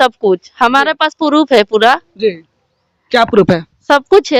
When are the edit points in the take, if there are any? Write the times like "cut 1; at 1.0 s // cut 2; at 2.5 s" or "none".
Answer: none